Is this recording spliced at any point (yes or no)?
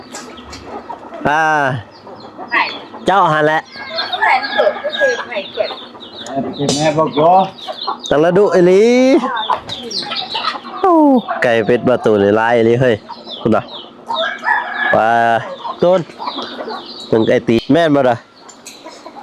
yes